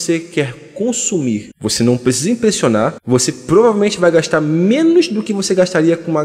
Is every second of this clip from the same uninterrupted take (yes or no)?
yes